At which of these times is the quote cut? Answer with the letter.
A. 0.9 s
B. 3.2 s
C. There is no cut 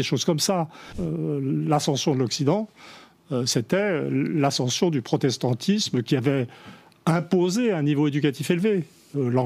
A